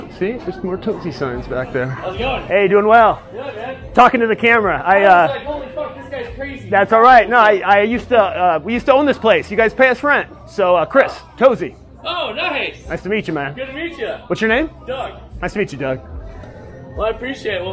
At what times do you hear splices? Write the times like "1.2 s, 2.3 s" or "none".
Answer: none